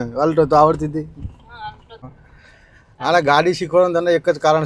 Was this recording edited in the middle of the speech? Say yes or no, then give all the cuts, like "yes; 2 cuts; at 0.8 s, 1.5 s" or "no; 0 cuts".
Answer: yes; 1 cut; at 2.0 s